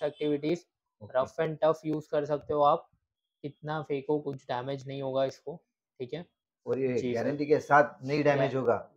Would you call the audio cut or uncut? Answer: uncut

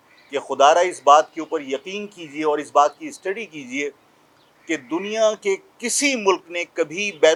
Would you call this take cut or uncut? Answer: uncut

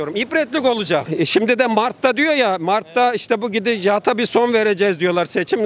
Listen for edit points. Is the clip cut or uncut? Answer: cut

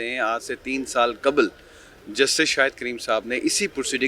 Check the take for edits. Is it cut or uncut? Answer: uncut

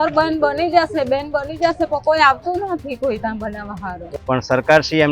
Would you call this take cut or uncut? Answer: cut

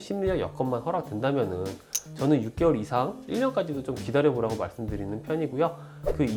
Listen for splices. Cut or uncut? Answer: uncut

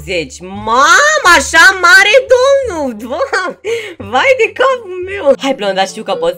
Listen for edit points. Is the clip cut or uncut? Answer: cut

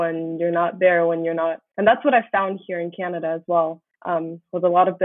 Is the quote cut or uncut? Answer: cut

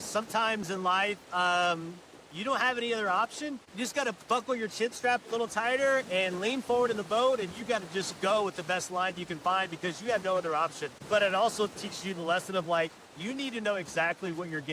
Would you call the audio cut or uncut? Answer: cut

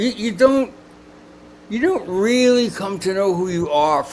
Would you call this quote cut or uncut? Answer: uncut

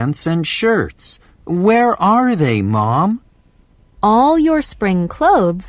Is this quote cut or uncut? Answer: cut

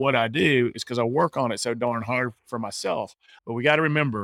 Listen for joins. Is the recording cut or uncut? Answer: cut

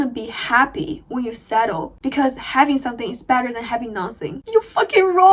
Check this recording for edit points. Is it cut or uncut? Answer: uncut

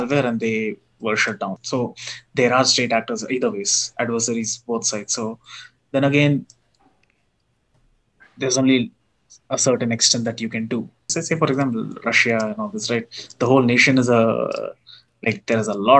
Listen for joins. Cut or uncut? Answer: cut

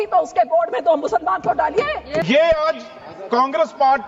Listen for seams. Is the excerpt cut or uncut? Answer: cut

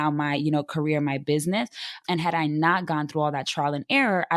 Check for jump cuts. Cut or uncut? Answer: uncut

